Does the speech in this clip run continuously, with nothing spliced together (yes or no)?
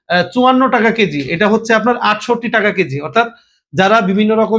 yes